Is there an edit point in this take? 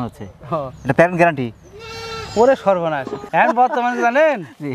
yes; 1 cut; at 3.2 s

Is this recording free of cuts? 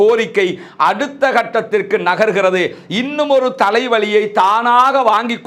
yes; 0 cuts

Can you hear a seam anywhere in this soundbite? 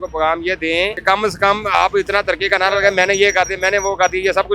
yes; 1 cut; at 1.0 s

